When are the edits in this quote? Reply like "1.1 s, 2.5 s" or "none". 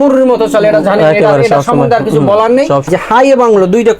2.9 s